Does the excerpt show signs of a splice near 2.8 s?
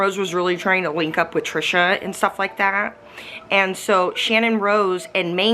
no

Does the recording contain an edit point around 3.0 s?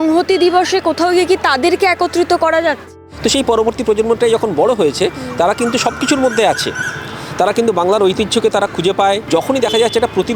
yes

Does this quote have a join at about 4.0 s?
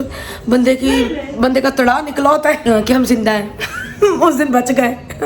no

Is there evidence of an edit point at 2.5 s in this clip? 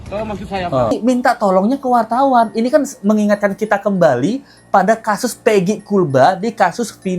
no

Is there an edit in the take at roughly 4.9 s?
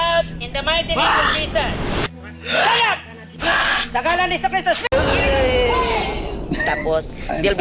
yes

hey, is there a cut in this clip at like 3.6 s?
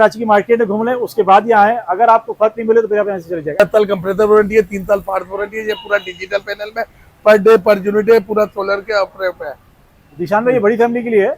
yes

